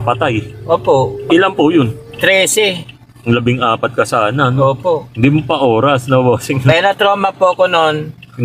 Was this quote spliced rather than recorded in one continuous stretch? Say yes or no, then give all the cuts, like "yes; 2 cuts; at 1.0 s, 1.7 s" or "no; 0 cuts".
no; 0 cuts